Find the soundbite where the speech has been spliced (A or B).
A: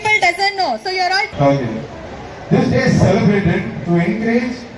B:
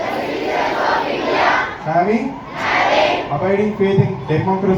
A